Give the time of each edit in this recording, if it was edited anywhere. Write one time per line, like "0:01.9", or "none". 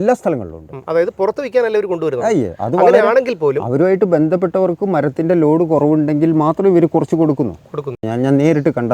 0:08.0